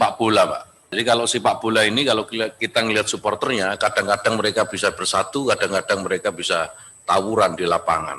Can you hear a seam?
yes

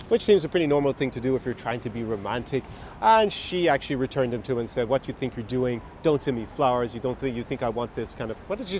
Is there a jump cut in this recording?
no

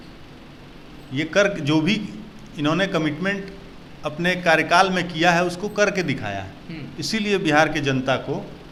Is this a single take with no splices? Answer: yes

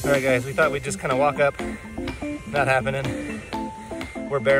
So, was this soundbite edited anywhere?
no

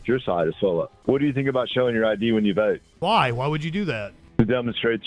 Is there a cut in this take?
yes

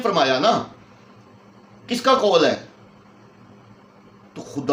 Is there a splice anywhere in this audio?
no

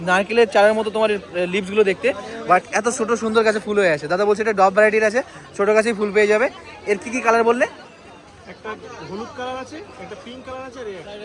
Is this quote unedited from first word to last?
yes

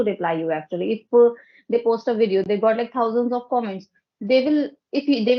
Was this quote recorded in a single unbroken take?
yes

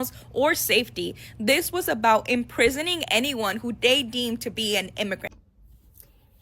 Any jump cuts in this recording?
yes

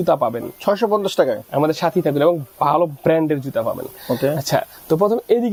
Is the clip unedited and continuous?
yes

